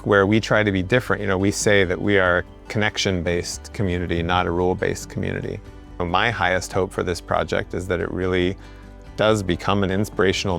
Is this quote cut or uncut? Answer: cut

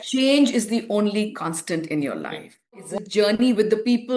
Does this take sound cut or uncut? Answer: cut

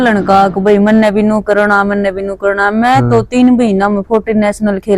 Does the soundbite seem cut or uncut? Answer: uncut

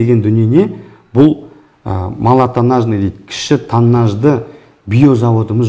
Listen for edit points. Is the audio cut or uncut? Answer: uncut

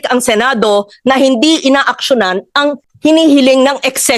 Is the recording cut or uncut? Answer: cut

